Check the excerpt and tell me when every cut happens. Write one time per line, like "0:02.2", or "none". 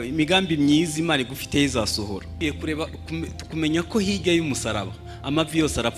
0:02.2